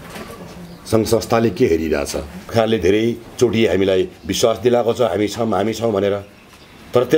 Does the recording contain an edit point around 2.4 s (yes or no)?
yes